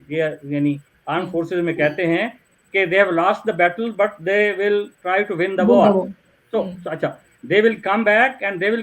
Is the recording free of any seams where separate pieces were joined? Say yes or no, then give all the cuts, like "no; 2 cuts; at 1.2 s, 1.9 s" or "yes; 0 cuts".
yes; 0 cuts